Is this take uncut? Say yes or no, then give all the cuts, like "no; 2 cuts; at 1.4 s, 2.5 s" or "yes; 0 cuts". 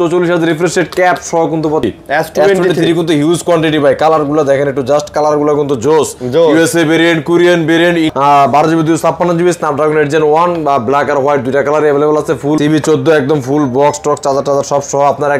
no; 3 cuts; at 1.8 s, 8.1 s, 12.6 s